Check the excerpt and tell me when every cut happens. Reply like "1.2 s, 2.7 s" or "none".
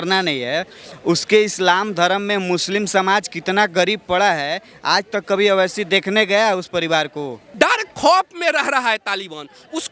7.5 s